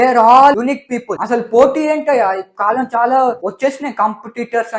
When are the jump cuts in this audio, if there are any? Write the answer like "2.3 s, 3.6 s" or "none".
1.2 s